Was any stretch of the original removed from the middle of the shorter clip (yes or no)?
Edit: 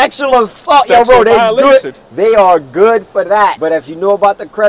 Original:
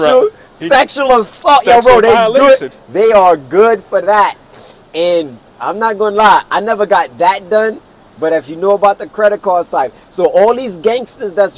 yes